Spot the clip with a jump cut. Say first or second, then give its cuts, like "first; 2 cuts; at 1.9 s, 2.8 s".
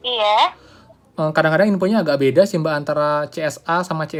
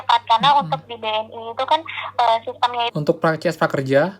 second; 1 cut; at 2.9 s